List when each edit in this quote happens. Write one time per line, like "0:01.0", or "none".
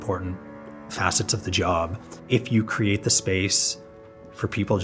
0:02.1